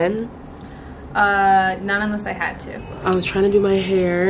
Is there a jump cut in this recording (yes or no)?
yes